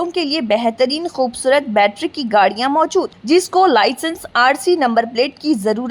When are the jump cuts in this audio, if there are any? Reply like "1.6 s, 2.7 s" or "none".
none

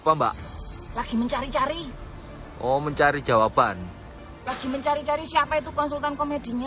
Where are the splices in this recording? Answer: none

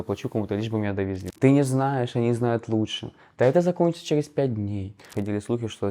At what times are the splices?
1.2 s, 5.0 s

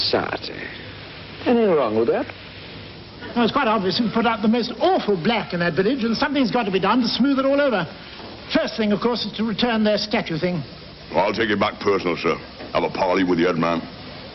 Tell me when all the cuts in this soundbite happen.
7.3 s

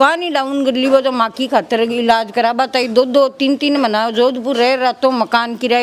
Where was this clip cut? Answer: none

